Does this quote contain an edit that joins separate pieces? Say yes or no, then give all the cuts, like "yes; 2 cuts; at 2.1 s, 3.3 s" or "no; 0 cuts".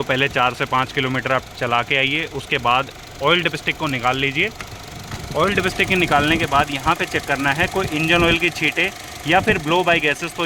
no; 0 cuts